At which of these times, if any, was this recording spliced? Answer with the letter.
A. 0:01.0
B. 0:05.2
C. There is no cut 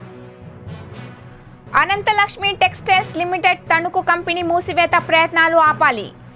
A